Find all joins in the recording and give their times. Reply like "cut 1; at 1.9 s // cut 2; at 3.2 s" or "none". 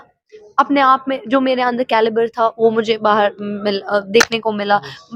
none